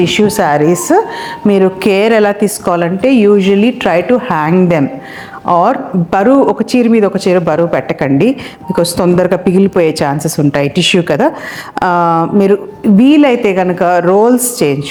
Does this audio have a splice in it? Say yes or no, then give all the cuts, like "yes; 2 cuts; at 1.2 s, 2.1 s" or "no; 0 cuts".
no; 0 cuts